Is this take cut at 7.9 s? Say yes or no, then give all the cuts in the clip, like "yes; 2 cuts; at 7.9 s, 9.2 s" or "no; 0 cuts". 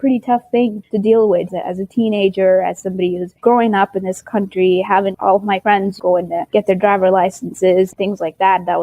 yes; 1 cut; at 7.9 s